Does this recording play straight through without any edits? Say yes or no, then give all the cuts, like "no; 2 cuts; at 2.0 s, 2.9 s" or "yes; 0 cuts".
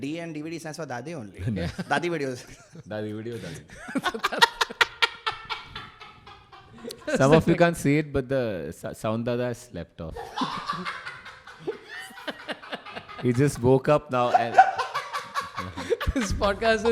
yes; 0 cuts